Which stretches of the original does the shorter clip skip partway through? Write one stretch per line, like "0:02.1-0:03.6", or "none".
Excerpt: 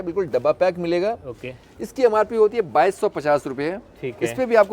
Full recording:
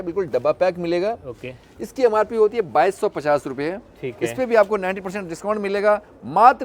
none